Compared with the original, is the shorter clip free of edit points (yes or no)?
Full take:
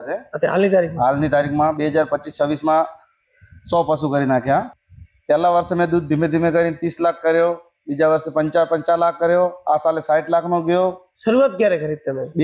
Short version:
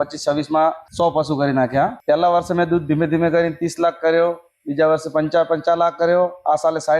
no